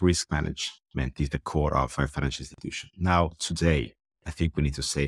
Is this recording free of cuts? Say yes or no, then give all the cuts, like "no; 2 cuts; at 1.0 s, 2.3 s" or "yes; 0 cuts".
yes; 0 cuts